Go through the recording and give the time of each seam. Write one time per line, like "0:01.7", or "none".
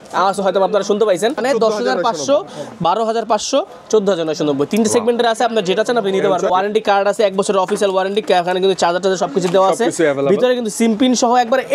0:01.4
0:06.5